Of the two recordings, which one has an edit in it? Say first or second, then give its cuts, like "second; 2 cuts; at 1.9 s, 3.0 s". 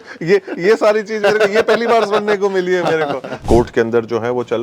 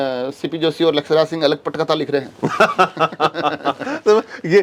first; 1 cut; at 3.4 s